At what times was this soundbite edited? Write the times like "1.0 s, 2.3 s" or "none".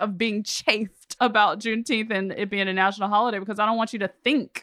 1.0 s